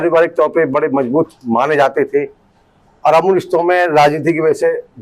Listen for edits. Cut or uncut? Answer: uncut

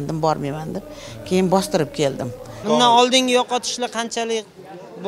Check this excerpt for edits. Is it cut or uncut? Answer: cut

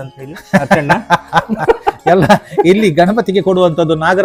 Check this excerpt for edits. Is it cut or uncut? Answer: uncut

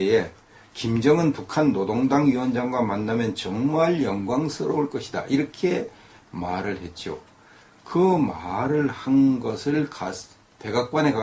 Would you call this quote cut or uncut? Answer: uncut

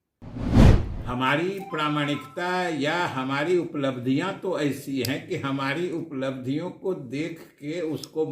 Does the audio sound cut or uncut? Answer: cut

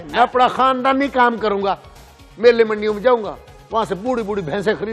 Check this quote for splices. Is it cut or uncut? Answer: uncut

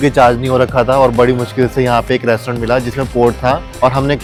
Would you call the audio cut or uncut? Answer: uncut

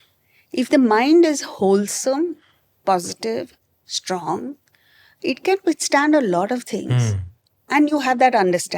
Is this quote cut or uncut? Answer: cut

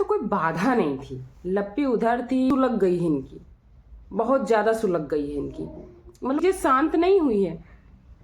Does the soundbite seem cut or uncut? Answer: cut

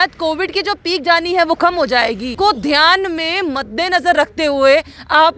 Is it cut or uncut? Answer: cut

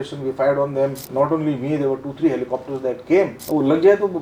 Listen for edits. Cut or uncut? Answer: cut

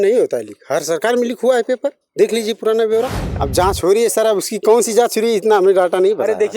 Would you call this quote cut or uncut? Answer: cut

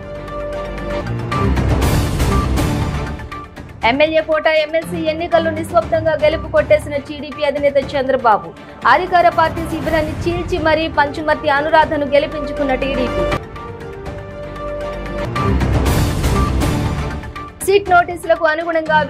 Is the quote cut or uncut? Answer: cut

